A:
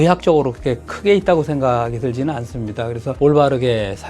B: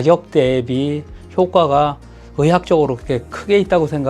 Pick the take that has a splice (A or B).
A